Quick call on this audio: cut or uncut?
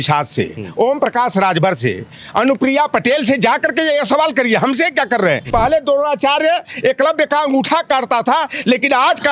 cut